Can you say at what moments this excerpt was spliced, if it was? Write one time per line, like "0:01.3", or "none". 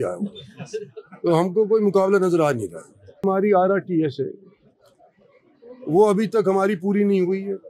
0:03.2